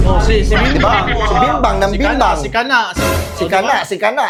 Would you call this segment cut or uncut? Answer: uncut